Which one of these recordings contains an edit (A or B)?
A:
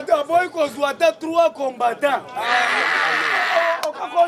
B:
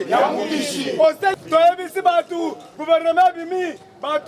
B